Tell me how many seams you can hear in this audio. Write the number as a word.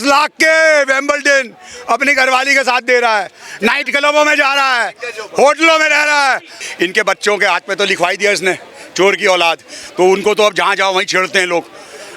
one